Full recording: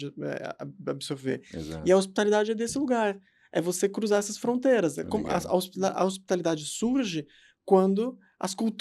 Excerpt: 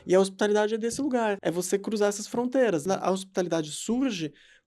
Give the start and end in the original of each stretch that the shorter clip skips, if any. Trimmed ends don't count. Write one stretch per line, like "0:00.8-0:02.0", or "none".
0:03.1-0:03.5
0:04.9-0:05.8